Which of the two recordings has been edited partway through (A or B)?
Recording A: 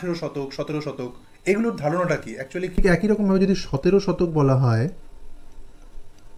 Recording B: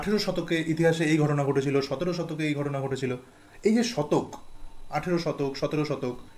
A